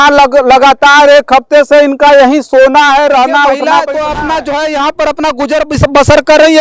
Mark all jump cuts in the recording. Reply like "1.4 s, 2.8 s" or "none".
3.7 s